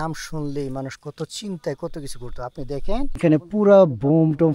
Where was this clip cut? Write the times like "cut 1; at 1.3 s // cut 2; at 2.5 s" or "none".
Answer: cut 1; at 3.2 s